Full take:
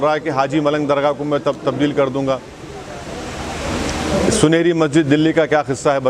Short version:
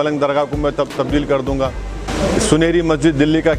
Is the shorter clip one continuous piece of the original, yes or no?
no